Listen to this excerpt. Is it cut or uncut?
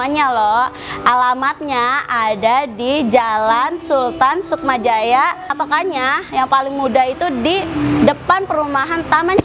cut